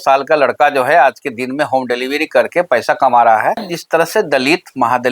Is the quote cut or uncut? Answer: cut